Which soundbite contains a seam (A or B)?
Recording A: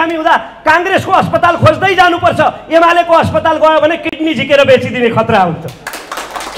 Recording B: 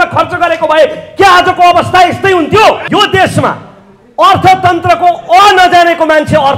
B